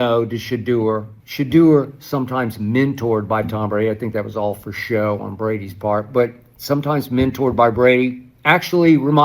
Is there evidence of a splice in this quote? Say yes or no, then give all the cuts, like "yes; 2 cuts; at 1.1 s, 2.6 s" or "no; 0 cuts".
yes; 1 cut; at 1.2 s